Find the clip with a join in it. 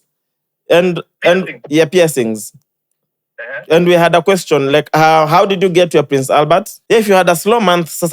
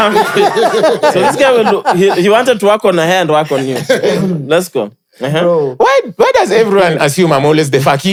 first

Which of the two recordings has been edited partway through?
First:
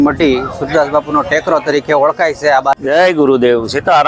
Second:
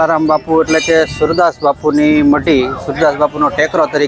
first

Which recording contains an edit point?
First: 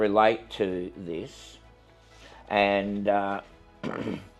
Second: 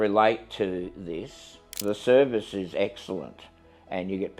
second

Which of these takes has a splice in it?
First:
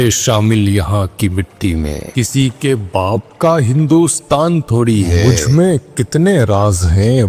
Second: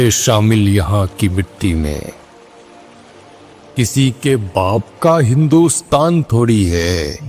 first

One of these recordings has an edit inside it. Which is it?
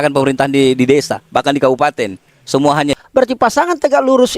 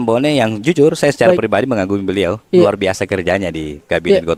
first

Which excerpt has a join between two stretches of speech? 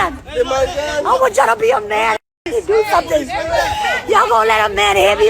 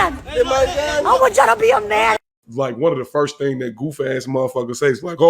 second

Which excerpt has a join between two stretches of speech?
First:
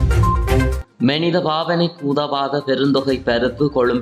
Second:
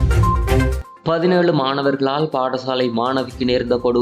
second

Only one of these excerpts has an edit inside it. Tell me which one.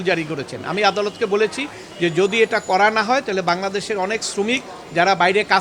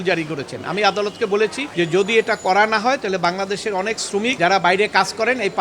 second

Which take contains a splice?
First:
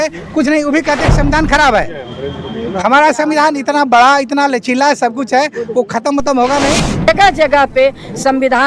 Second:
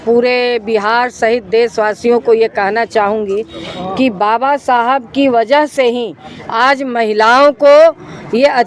first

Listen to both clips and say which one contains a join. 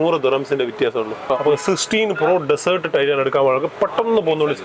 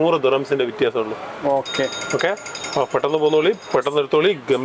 first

